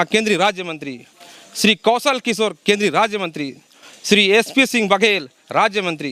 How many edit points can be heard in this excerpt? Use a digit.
0